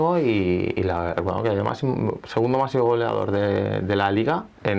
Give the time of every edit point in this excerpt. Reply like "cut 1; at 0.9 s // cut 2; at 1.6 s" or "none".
none

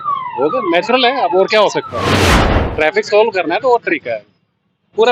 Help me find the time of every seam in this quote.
cut 1; at 2.2 s

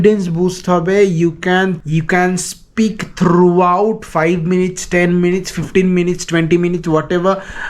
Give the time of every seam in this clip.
none

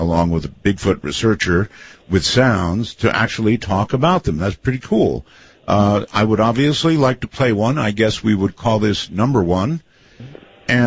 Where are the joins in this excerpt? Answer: cut 1; at 3.3 s

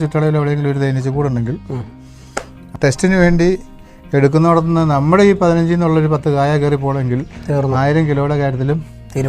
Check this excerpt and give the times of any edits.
cut 1; at 2.7 s

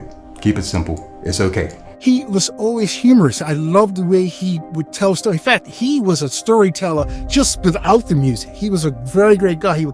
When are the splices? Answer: cut 1; at 1.8 s

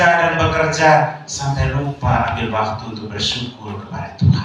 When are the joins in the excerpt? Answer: none

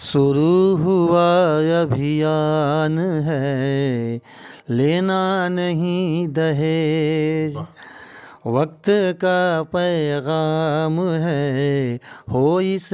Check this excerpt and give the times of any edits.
none

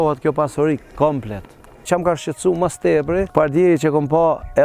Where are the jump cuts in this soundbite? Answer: cut 1; at 1.8 s // cut 2; at 3.3 s

